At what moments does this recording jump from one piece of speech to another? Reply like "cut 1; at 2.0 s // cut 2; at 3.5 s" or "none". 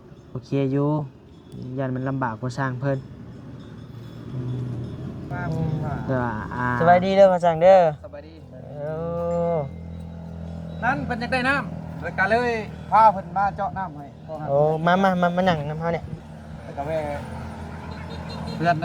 cut 1; at 6.8 s